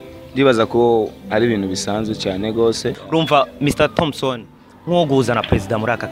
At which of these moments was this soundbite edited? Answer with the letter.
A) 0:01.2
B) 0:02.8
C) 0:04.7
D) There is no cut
B